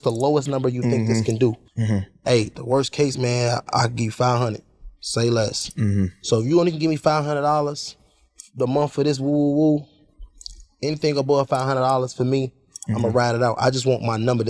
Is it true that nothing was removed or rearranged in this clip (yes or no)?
no